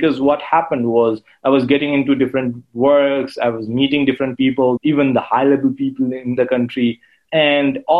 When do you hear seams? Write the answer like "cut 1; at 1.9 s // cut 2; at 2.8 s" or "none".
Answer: cut 1; at 4.8 s // cut 2; at 6.4 s // cut 3; at 7.1 s